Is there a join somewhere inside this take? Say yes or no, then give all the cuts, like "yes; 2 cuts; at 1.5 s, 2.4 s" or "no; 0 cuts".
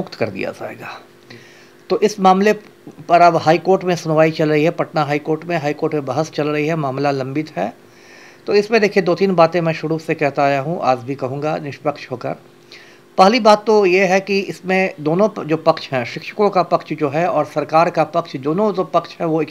no; 0 cuts